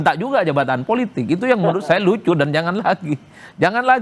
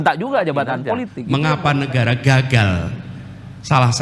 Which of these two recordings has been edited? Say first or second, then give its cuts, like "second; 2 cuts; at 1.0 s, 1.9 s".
second; 1 cut; at 1.1 s